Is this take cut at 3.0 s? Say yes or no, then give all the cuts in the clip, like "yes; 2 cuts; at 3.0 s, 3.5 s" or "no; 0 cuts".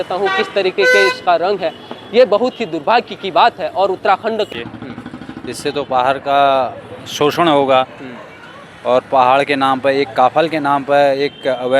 no; 1 cut; at 4.5 s